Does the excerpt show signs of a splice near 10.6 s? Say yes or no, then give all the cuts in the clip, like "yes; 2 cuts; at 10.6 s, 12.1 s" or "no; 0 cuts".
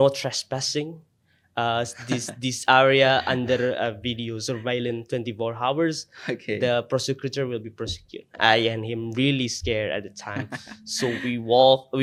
no; 0 cuts